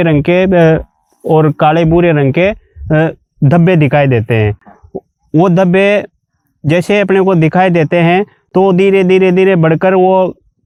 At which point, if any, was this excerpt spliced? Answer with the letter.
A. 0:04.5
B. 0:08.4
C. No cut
C